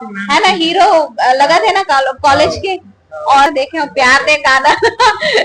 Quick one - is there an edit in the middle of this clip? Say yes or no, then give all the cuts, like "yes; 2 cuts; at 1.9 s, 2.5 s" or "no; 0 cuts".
yes; 1 cut; at 3.5 s